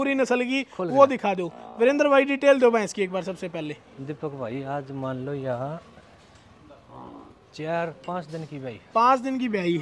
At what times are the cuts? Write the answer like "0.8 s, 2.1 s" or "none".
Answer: none